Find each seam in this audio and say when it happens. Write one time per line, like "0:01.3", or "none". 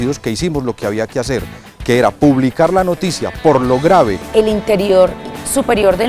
0:04.2